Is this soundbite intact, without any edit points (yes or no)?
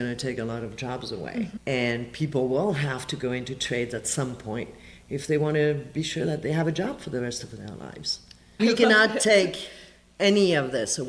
no